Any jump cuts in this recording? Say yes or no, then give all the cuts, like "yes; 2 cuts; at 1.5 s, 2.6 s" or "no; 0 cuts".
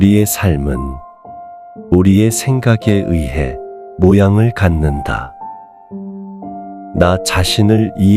no; 0 cuts